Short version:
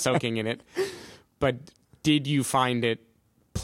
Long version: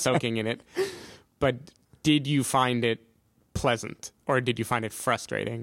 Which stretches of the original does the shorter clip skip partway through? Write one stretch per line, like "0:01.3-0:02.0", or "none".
none